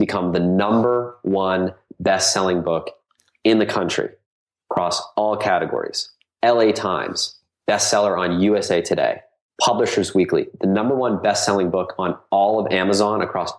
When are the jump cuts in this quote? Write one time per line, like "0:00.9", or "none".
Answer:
none